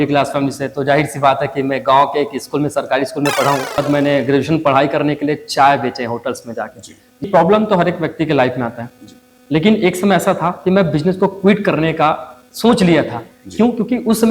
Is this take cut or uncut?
cut